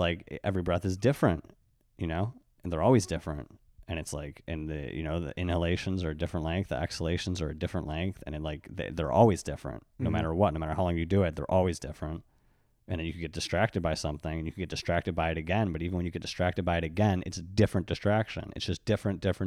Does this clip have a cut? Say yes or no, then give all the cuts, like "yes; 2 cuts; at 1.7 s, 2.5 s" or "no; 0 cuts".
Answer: no; 0 cuts